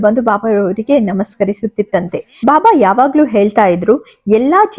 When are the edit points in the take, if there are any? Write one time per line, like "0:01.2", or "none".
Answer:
none